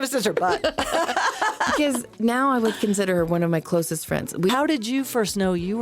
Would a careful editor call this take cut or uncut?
cut